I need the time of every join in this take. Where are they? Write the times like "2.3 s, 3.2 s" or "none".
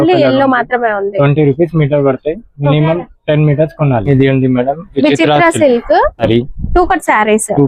4.1 s, 6.2 s

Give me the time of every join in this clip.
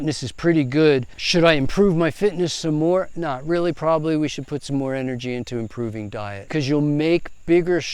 1.2 s, 6.4 s

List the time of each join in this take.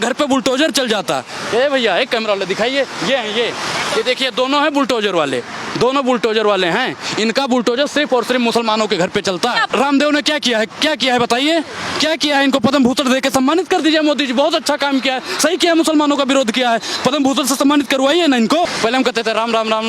9.6 s, 18.7 s

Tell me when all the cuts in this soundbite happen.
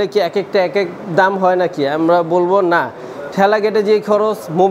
none

